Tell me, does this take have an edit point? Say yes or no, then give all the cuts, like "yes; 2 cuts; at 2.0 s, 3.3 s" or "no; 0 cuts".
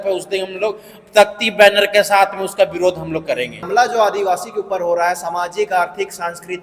yes; 1 cut; at 3.6 s